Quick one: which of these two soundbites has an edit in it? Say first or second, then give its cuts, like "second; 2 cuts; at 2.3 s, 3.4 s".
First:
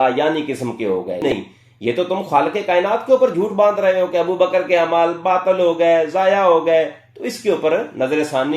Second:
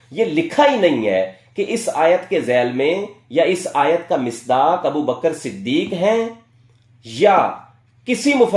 first; 1 cut; at 1.2 s